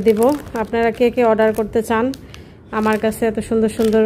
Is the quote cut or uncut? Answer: uncut